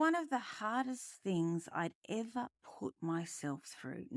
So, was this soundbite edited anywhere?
no; 0 cuts

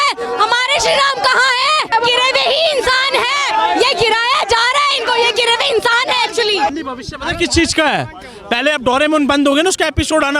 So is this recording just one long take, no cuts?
no; 2 cuts; at 1.9 s, 6.7 s

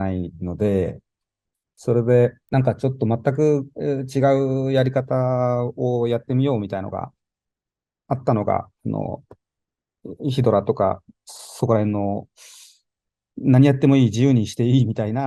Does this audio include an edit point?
yes; 1 cut; at 2.4 s

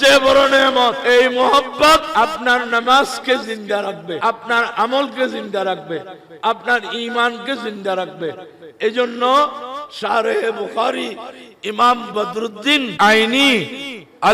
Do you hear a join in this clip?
yes; 4 cuts; at 1.0 s, 2.1 s, 4.2 s, 12.9 s

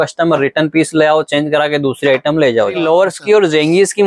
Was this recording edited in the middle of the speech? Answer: yes; 1 cut; at 2.8 s

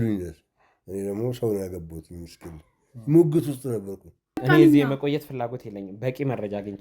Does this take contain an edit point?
yes; 1 cut; at 4.4 s

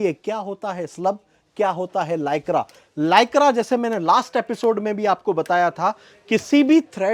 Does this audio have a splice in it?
no; 0 cuts

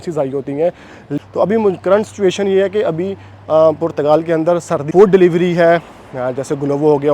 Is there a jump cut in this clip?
yes; 2 cuts; at 1.1 s, 4.9 s

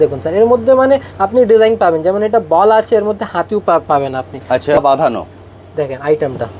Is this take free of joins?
no; 1 cut; at 4.8 s

